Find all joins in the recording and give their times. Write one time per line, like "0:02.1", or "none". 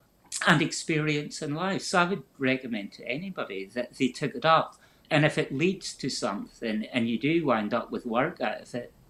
0:05.0